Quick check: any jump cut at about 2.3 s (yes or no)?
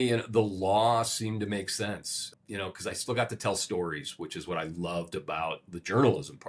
no